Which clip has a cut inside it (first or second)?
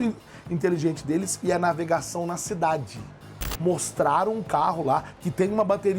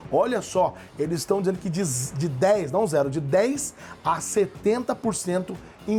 first